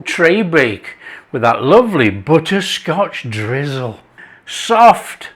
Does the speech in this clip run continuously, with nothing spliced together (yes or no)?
no